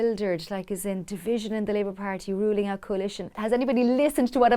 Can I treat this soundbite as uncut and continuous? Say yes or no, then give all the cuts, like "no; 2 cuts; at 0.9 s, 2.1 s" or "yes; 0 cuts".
no; 1 cut; at 3.4 s